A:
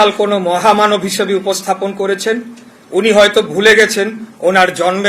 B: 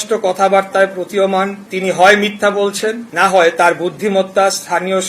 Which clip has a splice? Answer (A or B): B